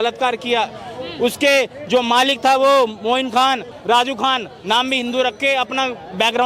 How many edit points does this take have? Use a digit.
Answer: 1